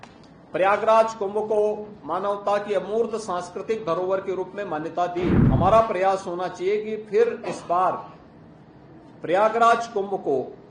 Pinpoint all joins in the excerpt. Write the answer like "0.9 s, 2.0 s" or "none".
5.4 s